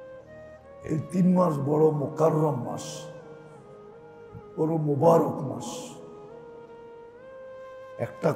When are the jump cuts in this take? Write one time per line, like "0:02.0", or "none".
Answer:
0:00.9